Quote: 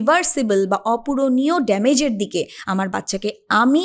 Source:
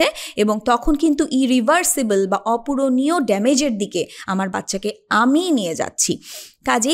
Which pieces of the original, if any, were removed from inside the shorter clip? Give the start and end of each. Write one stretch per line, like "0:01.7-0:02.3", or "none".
none